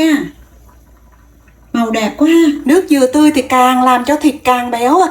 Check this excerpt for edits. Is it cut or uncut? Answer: cut